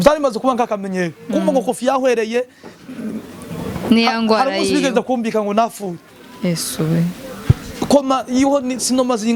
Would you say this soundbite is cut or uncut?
uncut